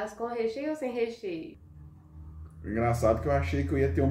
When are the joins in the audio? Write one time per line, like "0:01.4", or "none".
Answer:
0:01.5